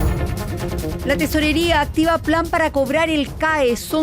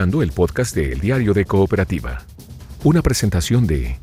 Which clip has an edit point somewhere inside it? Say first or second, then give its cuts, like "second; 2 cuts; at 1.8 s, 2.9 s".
first; 1 cut; at 1.1 s